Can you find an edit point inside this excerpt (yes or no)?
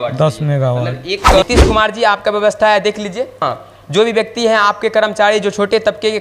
yes